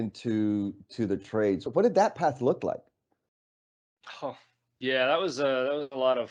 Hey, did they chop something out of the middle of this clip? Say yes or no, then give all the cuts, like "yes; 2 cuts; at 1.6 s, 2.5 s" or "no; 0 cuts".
yes; 1 cut; at 1.7 s